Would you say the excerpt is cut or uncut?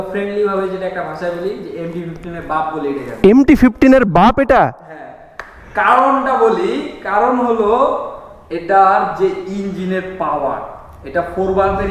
uncut